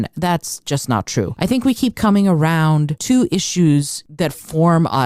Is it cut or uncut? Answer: cut